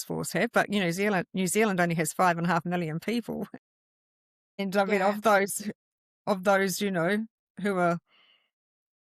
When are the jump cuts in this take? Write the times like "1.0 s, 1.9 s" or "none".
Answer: none